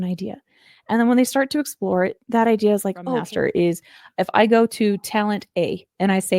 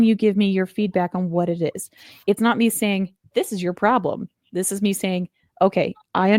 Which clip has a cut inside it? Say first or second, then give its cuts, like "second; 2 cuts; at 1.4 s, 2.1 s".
first; 1 cut; at 3.3 s